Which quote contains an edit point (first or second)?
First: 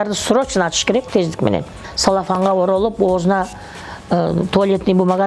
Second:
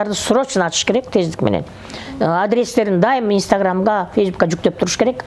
first